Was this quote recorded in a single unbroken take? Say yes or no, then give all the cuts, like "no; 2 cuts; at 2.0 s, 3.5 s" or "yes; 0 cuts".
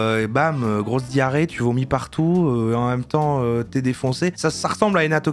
yes; 0 cuts